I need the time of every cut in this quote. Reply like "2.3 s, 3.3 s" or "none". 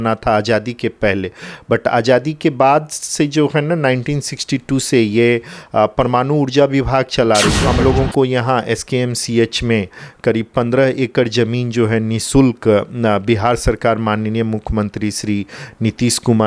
7.6 s